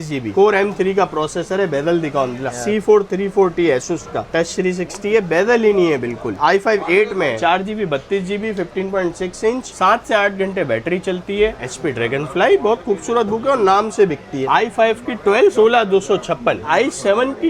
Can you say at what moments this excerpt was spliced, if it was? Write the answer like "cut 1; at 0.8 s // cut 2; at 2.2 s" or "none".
cut 1; at 2.5 s // cut 2; at 4.2 s // cut 3; at 6.4 s // cut 4; at 7.4 s // cut 5; at 11.5 s // cut 6; at 14.3 s // cut 7; at 15.5 s // cut 8; at 16.6 s